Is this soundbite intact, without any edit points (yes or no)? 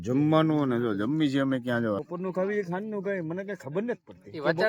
no